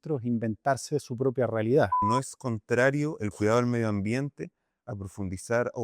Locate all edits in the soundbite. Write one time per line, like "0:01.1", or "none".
0:02.0